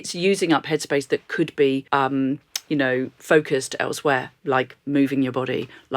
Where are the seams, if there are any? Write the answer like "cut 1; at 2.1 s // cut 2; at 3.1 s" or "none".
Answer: cut 1; at 1.8 s // cut 2; at 3.1 s

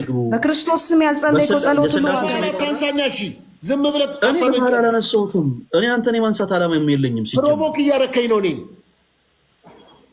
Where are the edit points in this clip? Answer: cut 1; at 2.4 s

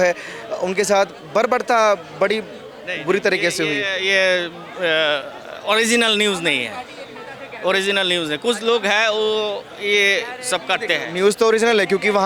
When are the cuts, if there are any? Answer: none

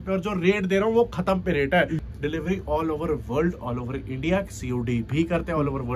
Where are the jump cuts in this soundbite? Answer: cut 1; at 2.0 s

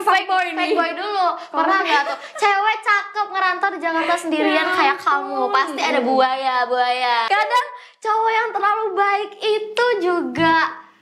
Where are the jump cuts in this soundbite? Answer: cut 1; at 7.2 s

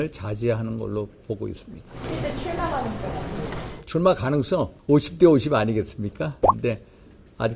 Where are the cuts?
cut 1; at 1.9 s // cut 2; at 4.8 s // cut 3; at 6.5 s

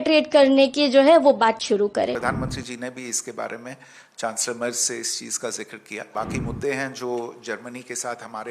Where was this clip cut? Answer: cut 1; at 2.1 s // cut 2; at 6.0 s

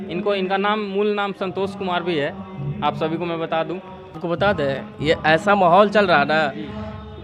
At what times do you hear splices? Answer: cut 1; at 4.2 s

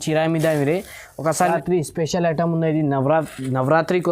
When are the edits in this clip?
cut 1; at 1.4 s

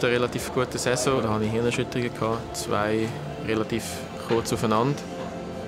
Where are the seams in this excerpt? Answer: cut 1; at 1.2 s

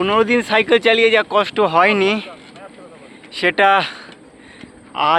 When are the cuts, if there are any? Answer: none

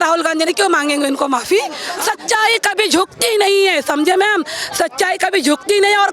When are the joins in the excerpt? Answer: cut 1; at 1.9 s

